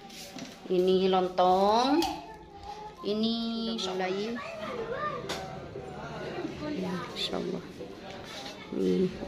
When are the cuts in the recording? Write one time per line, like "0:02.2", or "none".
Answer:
0:03.8